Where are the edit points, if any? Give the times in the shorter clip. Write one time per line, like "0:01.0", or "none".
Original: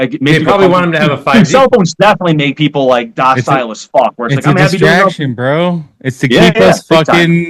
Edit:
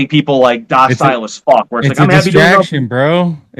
none

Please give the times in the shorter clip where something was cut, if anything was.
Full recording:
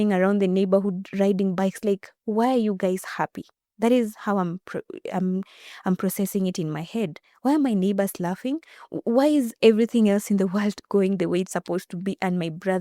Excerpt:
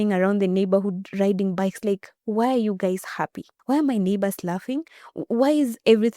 0:03.5

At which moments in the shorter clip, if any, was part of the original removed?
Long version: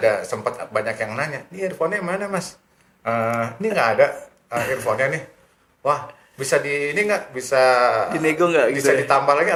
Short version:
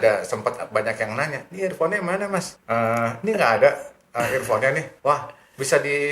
0:02.5
0:04.9

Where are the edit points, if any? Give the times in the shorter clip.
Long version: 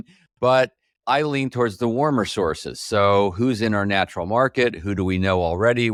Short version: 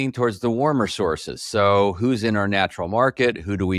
none

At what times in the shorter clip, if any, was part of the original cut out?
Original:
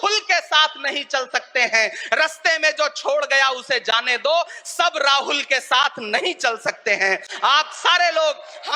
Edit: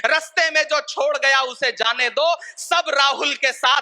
none

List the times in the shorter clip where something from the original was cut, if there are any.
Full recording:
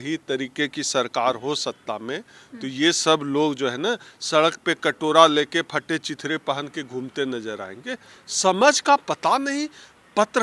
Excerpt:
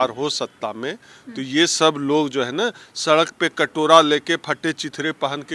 none

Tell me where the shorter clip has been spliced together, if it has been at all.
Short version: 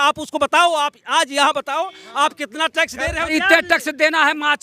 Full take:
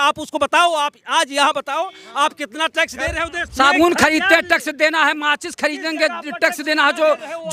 0:03.3

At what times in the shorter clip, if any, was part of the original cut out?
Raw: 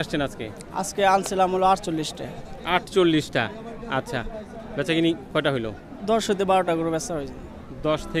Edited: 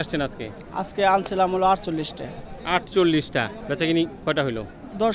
0:03.6

